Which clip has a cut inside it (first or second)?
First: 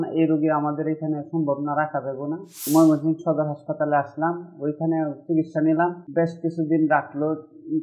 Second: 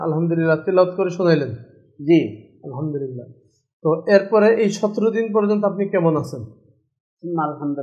first